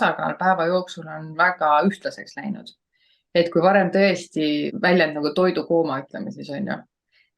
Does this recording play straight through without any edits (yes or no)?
no